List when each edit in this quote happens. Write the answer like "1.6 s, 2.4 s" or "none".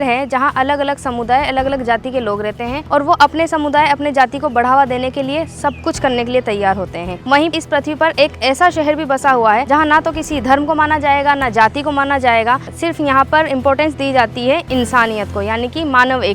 2.8 s, 7.5 s, 9.6 s, 12.7 s